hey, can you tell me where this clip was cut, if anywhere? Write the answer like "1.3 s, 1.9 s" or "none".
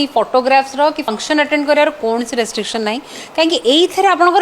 1.1 s